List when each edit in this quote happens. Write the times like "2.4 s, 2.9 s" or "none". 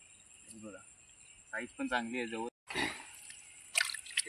2.5 s